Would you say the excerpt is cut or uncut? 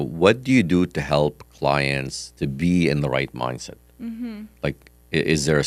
uncut